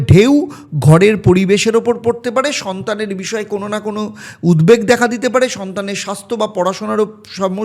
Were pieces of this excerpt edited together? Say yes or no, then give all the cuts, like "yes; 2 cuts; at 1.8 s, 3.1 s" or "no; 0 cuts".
no; 0 cuts